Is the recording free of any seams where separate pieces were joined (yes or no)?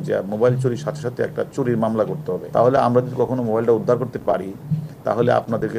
no